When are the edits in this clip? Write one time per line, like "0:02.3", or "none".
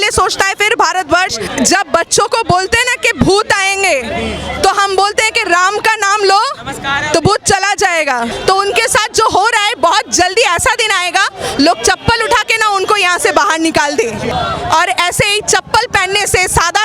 0:01.5
0:08.3
0:14.3